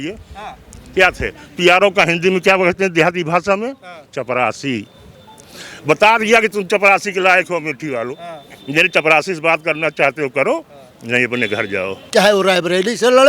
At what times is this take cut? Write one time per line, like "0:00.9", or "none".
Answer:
0:12.0